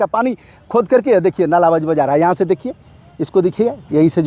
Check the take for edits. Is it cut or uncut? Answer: uncut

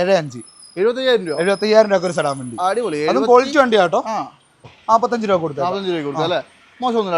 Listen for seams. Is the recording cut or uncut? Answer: cut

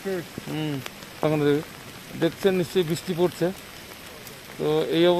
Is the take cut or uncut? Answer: cut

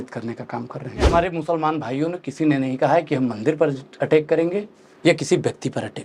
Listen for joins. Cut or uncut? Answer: cut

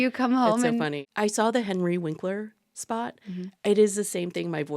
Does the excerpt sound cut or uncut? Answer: cut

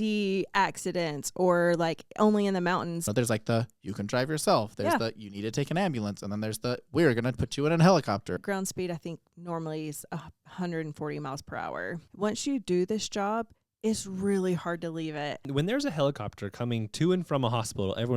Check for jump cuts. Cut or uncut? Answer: cut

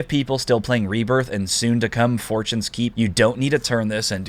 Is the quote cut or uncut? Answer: cut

